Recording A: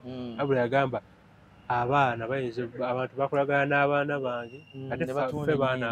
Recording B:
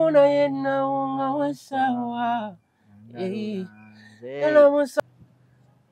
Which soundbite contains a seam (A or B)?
B